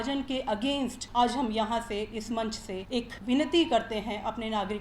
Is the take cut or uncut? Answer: cut